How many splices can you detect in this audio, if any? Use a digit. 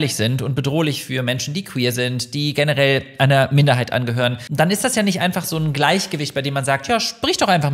0